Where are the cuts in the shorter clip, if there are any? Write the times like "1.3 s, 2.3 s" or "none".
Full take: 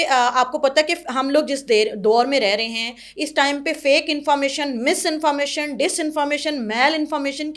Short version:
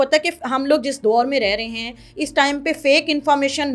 1.0 s

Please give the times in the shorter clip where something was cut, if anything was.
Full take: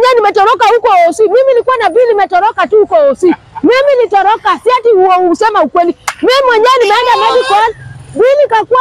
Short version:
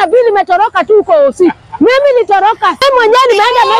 2.8 s

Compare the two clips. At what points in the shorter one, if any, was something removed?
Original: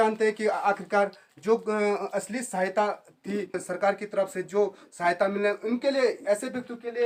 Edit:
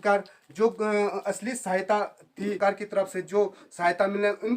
2.6 s

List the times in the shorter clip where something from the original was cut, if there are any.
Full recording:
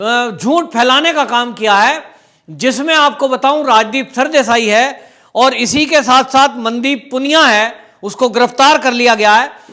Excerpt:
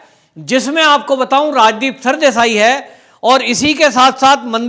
none

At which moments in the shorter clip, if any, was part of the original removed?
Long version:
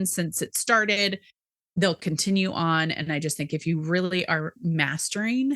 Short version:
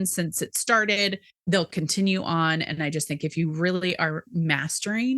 1.3 s

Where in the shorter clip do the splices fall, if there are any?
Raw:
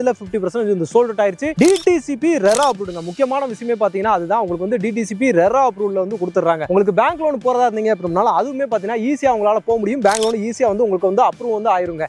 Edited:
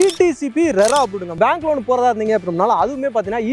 1.4 s

